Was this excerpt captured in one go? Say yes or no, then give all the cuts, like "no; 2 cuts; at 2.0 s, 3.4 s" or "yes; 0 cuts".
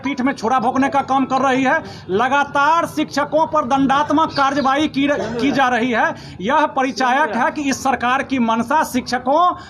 yes; 0 cuts